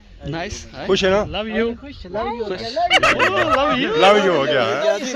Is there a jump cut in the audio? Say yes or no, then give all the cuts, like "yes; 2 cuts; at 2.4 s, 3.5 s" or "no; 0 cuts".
no; 0 cuts